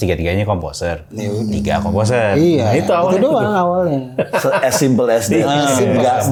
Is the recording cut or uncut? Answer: uncut